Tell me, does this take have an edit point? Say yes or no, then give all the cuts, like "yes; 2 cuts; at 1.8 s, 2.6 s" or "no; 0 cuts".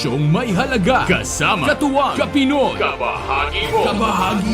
yes; 1 cut; at 1.0 s